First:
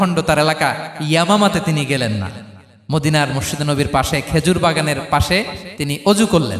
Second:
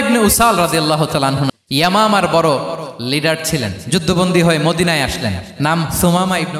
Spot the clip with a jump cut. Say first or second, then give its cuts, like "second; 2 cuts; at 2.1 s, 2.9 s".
second; 1 cut; at 1.5 s